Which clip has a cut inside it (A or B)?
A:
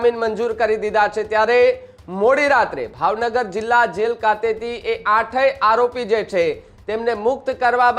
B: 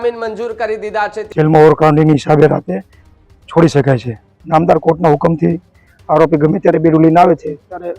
B